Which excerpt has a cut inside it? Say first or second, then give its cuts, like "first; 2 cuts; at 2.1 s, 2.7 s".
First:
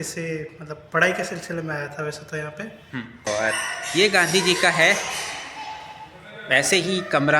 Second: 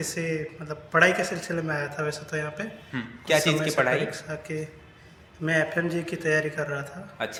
first; 1 cut; at 3.1 s